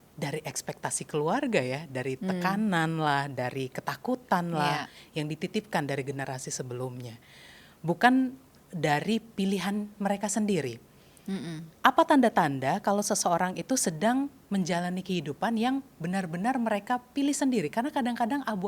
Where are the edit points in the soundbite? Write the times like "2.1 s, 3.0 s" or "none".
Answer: none